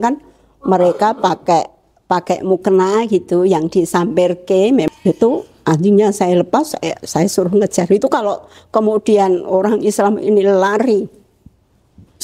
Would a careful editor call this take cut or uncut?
cut